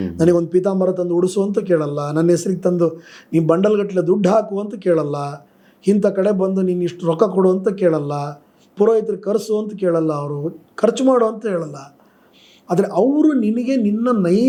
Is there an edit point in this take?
no; 0 cuts

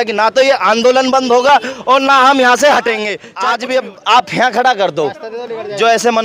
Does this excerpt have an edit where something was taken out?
yes; 1 cut; at 3.2 s

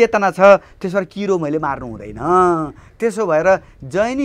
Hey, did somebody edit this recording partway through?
no; 0 cuts

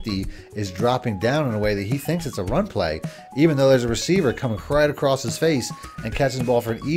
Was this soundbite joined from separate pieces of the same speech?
no; 0 cuts

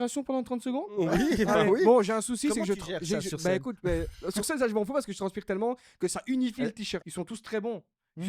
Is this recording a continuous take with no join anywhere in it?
no; 1 cut; at 7.0 s

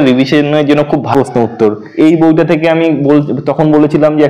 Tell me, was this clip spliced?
yes; 1 cut; at 1.1 s

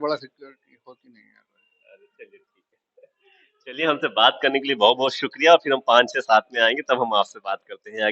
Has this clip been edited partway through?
no; 0 cuts

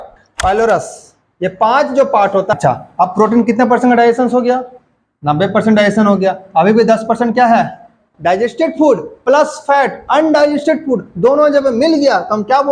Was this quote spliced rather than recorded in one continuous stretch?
yes; 2 cuts; at 2.5 s, 8.1 s

